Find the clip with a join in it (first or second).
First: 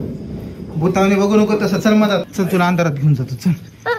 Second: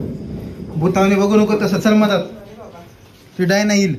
first